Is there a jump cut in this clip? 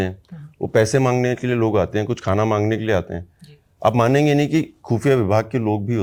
no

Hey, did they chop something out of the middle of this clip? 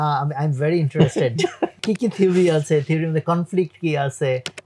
yes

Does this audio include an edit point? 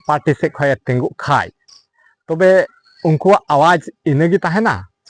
no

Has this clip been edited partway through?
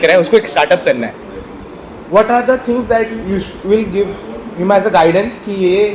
no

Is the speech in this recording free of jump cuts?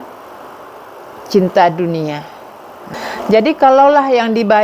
no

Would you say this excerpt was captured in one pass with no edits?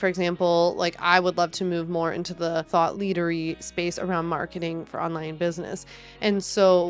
no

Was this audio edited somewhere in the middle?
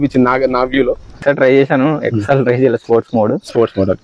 yes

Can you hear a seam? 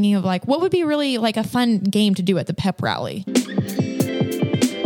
yes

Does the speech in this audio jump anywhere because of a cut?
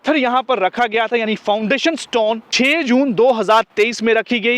yes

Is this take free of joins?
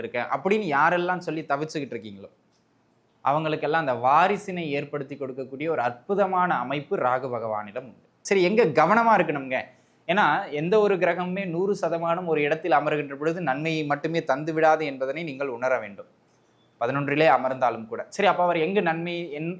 no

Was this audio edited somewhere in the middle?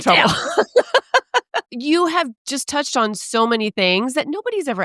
yes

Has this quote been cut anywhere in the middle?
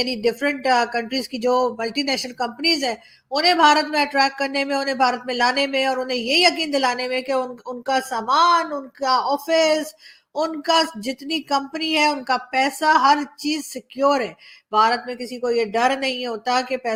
no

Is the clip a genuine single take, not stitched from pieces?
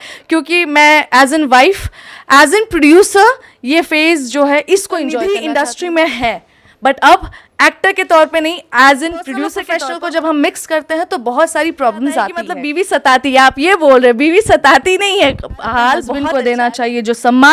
no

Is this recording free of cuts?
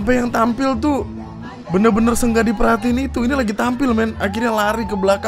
yes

